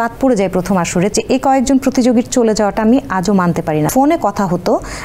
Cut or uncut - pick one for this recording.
cut